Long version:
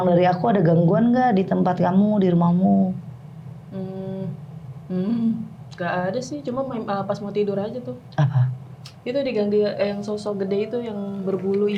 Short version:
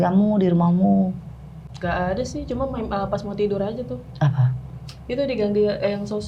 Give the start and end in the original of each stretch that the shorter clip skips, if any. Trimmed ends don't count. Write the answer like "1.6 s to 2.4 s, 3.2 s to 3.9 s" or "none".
3.4 s to 5.6 s